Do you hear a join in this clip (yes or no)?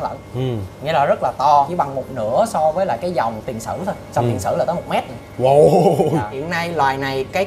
yes